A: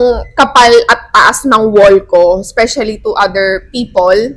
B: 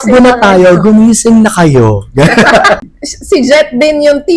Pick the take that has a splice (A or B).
B